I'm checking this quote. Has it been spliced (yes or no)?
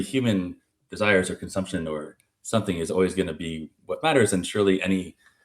yes